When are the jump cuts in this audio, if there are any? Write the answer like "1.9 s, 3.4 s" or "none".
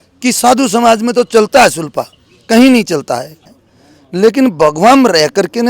3.4 s